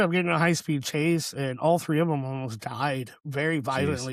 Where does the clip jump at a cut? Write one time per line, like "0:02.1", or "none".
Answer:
none